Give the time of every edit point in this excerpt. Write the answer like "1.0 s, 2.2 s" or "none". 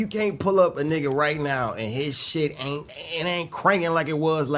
3.0 s